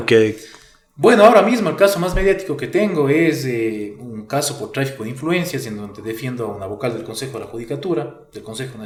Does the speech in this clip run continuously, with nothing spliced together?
yes; 0 cuts

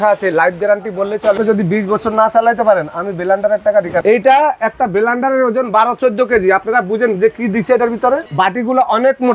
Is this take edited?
yes; 3 cuts; at 1.4 s, 4.0 s, 8.3 s

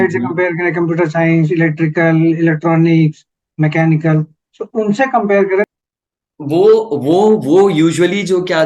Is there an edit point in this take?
yes; 1 cut; at 5.7 s

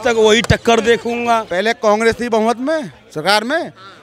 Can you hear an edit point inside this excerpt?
yes; 1 cut; at 1.5 s

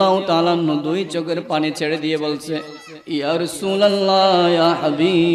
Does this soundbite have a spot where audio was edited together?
no; 0 cuts

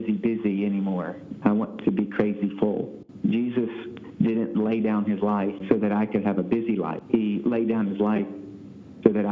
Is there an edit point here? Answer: yes; 3 cuts; at 3.0 s, 5.6 s, 7.0 s

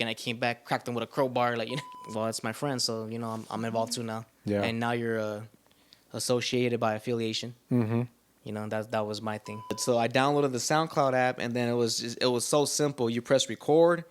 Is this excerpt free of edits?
no; 2 cuts; at 1.9 s, 9.8 s

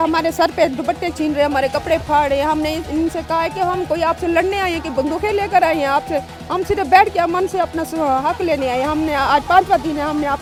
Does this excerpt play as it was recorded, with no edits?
yes; 0 cuts

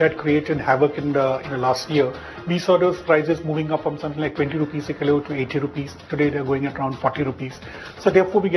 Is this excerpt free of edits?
yes; 0 cuts

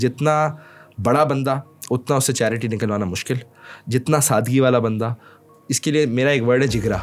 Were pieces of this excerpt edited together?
no; 0 cuts

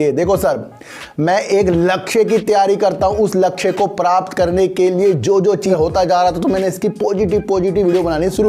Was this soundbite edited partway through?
yes; 1 cut; at 5.7 s

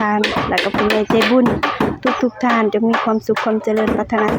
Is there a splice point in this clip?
no; 0 cuts

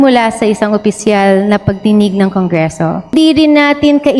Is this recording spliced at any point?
yes; 1 cut; at 3.1 s

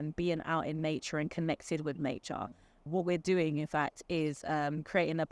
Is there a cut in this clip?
no; 0 cuts

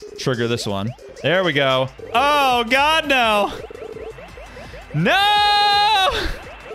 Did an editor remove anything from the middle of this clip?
yes; 2 cuts; at 1.0 s, 2.0 s

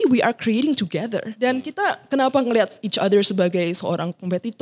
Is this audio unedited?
no; 1 cut; at 1.3 s

